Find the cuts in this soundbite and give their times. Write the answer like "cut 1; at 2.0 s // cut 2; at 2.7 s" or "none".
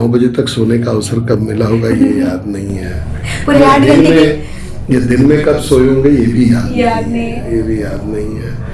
none